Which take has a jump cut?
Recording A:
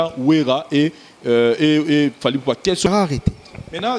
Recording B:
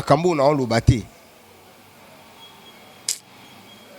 A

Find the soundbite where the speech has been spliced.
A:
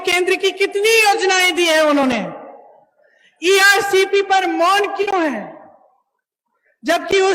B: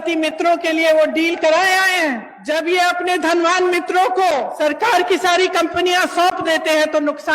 B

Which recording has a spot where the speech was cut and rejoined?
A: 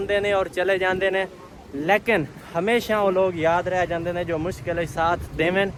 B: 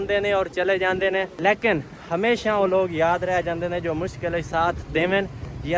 B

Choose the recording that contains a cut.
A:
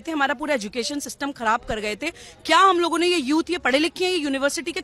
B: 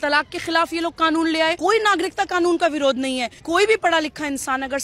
B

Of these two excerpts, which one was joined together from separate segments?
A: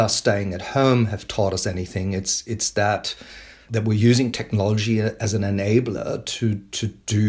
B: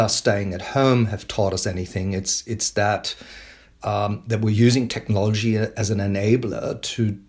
A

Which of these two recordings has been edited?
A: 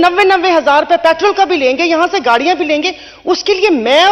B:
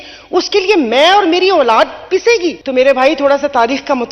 B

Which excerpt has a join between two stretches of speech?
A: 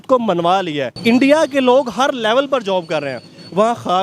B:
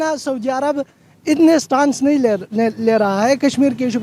A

